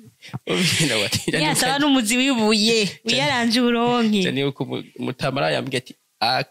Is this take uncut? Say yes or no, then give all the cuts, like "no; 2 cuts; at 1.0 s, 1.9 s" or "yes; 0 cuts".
yes; 0 cuts